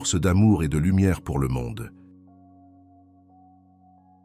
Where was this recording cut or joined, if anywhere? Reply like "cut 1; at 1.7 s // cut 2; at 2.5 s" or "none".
cut 1; at 1.8 s